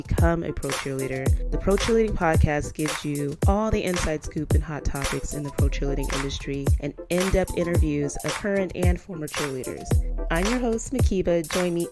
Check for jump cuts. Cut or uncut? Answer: uncut